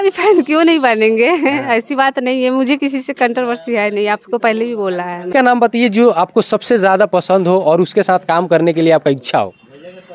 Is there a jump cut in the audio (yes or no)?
yes